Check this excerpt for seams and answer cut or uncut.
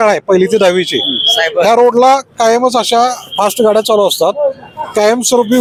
uncut